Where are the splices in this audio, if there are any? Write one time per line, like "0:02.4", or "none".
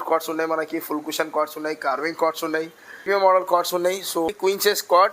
0:03.1
0:04.3